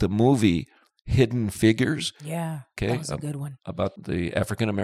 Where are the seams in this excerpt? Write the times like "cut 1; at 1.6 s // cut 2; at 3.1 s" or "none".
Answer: cut 1; at 2.6 s // cut 2; at 3.9 s